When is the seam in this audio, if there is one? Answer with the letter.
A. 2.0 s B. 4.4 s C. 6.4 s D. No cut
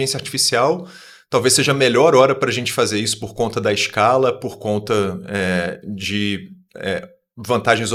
D